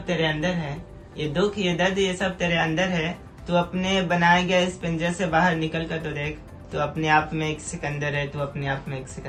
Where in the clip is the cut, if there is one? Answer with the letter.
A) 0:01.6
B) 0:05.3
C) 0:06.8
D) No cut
D